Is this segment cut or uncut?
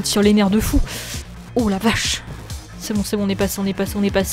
uncut